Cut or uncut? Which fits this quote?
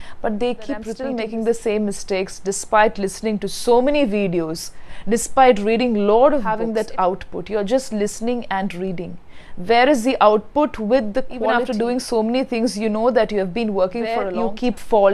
cut